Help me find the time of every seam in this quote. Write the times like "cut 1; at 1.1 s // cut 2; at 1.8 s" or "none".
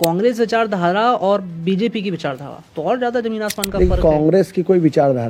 none

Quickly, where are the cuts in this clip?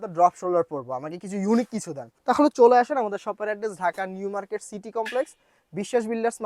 cut 1; at 2.1 s

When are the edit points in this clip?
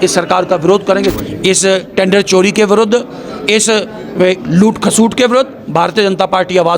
cut 1; at 1.1 s

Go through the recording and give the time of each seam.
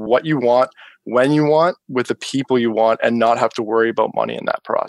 none

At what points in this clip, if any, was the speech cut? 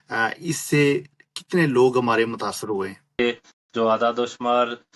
cut 1; at 3.1 s

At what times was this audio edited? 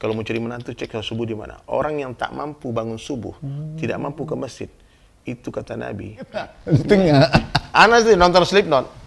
cut 1; at 6.6 s

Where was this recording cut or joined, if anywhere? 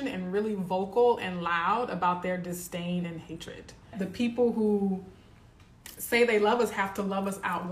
cut 1; at 3.9 s

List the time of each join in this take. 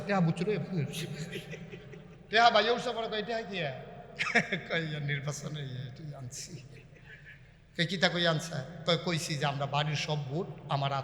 cut 1; at 2.1 s // cut 2; at 8.7 s

